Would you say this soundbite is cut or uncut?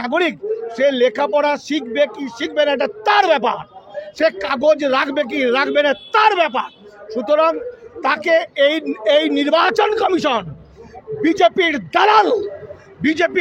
uncut